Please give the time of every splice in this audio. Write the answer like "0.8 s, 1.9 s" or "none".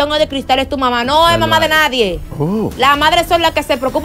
2.3 s